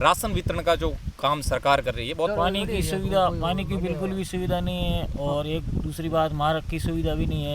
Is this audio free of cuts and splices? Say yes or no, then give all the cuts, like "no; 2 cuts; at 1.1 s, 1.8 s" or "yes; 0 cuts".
no; 1 cut; at 2.3 s